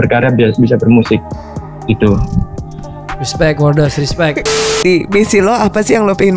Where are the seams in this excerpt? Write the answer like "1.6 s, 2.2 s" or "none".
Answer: 4.8 s